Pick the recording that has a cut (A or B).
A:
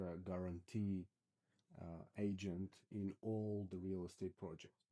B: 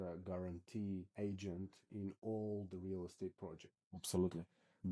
B